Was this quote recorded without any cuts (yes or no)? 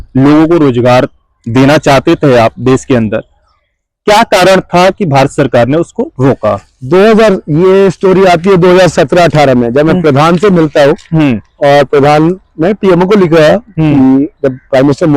yes